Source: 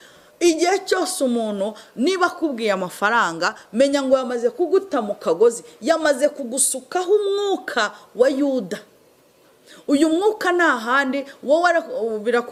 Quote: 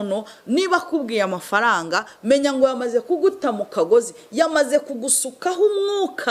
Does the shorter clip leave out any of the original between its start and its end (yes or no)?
no